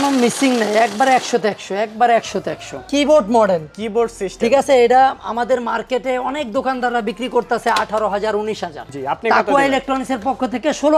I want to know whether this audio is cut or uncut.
cut